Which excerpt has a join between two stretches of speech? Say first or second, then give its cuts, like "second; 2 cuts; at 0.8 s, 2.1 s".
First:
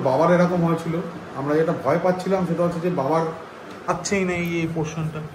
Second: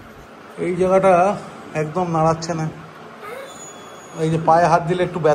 first; 1 cut; at 3.9 s